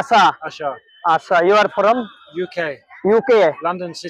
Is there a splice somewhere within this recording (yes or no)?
no